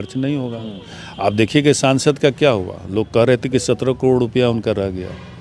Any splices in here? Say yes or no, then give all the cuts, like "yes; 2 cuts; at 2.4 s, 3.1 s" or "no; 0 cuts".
no; 0 cuts